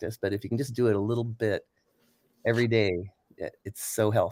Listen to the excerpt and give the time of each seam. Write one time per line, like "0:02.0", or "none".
none